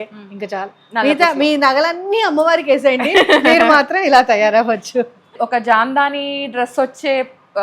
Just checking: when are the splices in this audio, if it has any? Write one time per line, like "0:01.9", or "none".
0:05.3